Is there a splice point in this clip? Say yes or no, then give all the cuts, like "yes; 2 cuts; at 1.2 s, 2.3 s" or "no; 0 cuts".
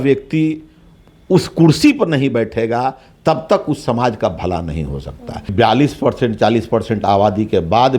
yes; 1 cut; at 5.5 s